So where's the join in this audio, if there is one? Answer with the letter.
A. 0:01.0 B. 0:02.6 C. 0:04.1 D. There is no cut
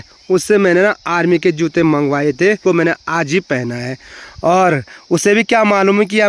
B